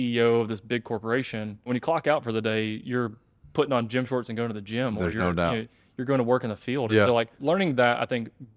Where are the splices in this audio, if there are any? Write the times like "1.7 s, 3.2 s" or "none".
1.7 s, 7.4 s